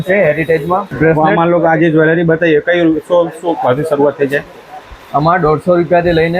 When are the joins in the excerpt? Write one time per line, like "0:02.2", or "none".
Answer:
none